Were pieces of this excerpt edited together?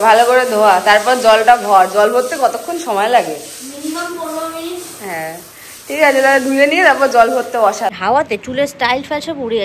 yes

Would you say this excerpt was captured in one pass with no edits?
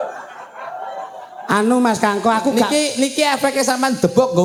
yes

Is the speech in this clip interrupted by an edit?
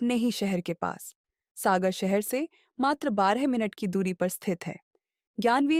no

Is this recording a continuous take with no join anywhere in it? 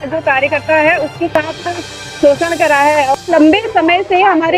no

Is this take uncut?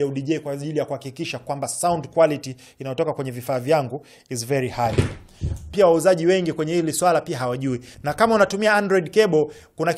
no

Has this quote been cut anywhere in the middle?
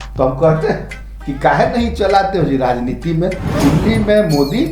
yes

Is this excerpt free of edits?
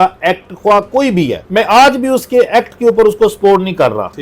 no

